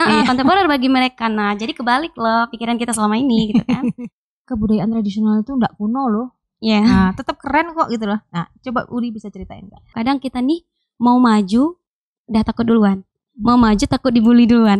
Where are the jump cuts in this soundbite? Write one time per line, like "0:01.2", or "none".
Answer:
0:03.9
0:09.9